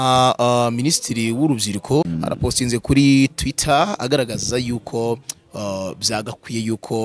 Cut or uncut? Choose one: cut